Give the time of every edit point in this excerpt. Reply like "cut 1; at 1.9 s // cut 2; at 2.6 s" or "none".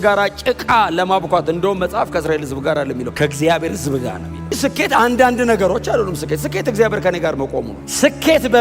cut 1; at 3.1 s // cut 2; at 4.5 s // cut 3; at 7.8 s